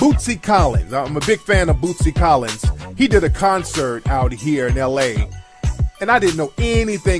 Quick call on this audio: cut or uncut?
uncut